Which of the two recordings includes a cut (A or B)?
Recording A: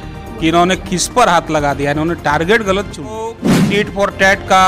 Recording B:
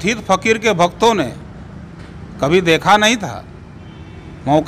A